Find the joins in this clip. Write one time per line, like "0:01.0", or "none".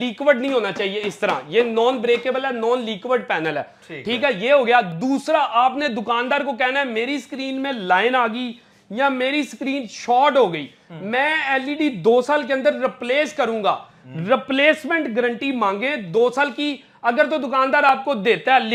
none